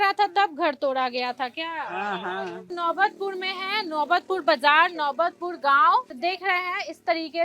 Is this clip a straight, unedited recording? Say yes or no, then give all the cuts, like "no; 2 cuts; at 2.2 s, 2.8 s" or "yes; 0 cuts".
no; 2 cuts; at 2.7 s, 6.2 s